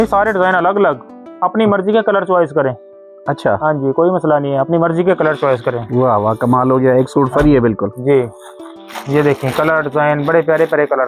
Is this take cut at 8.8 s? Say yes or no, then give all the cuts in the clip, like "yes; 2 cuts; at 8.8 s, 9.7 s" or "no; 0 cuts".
no; 0 cuts